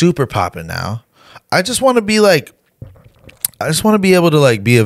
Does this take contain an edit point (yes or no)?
no